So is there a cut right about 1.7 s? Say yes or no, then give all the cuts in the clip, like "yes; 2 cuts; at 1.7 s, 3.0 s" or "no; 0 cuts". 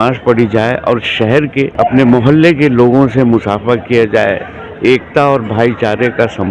yes; 1 cut; at 1.7 s